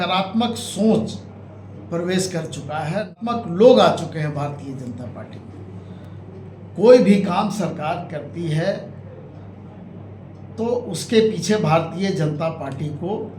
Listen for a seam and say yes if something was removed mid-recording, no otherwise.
yes